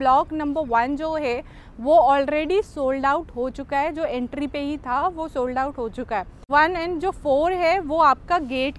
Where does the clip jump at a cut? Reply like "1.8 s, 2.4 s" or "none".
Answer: 6.4 s